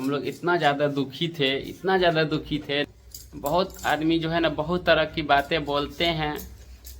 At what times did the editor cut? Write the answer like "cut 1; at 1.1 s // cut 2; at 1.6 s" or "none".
cut 1; at 2.8 s

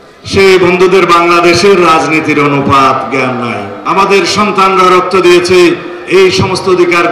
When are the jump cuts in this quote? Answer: cut 1; at 3.8 s

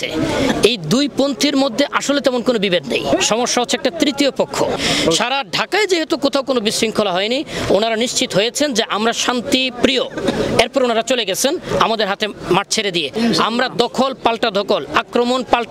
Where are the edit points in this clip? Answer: cut 1; at 3.1 s // cut 2; at 4.8 s // cut 3; at 13.1 s

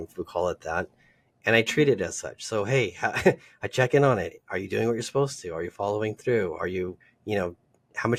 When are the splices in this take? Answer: none

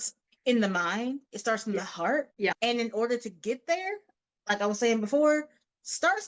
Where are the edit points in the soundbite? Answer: cut 1; at 2.3 s

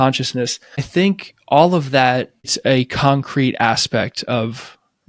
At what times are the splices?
cut 1; at 0.9 s // cut 2; at 2.5 s

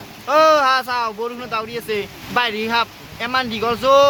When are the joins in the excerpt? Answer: none

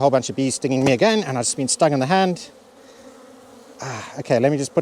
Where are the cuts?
none

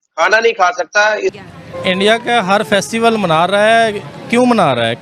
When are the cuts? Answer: cut 1; at 1.4 s

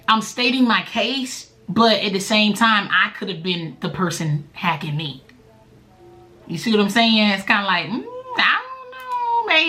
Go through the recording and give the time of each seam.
none

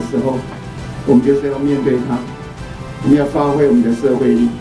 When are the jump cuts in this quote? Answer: none

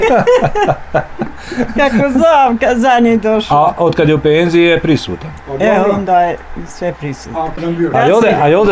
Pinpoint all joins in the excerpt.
cut 1; at 7.6 s

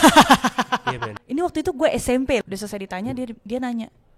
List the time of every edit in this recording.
cut 1; at 1.1 s // cut 2; at 2.4 s

